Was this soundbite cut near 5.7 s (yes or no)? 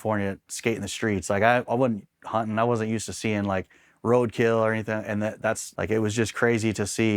yes